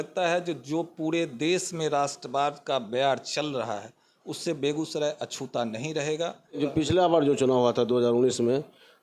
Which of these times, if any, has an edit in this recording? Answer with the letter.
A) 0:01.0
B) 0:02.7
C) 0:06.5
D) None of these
C